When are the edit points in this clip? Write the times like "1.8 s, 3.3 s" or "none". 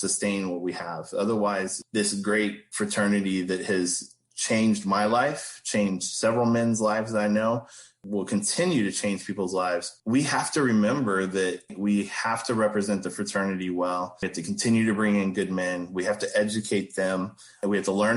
2.6 s, 9.9 s